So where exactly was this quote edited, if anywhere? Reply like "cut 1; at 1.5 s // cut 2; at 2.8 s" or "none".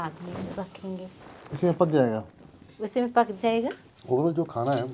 cut 1; at 1.3 s // cut 2; at 3.9 s